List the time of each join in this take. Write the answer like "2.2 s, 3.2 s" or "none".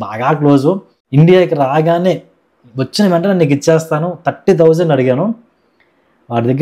0.9 s